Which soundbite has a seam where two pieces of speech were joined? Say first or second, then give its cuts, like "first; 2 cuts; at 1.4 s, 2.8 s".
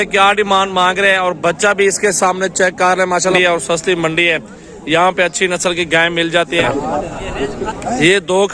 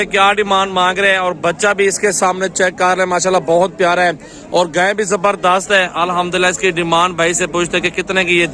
first; 2 cuts; at 3.3 s, 6.6 s